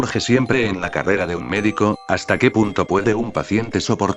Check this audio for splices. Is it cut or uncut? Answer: cut